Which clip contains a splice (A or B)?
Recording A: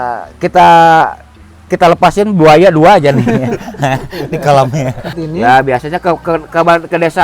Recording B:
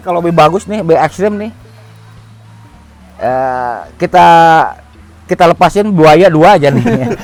A